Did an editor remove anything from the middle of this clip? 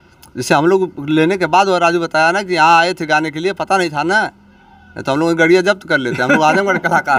no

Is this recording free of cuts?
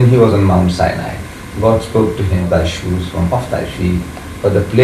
no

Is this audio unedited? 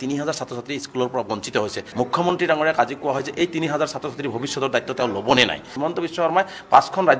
no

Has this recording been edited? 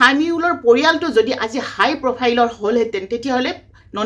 no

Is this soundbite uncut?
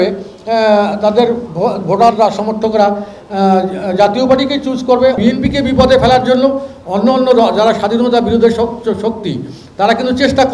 no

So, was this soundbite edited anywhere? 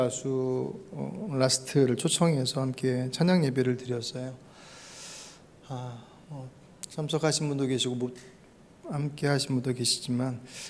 no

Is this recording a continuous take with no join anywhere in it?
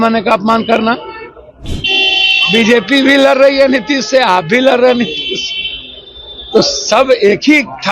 no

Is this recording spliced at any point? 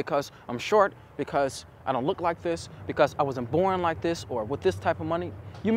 no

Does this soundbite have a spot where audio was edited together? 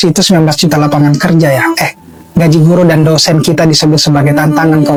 no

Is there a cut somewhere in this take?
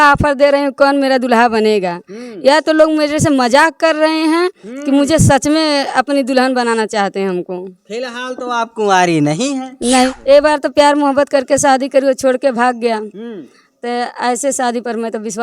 yes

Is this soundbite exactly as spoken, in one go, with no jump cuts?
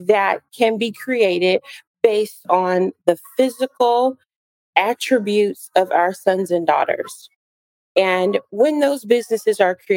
yes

